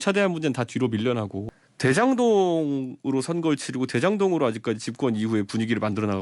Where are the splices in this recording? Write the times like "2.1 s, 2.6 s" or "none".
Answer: 1.4 s